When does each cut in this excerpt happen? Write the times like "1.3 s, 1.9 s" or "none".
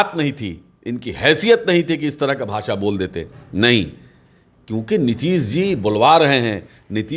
none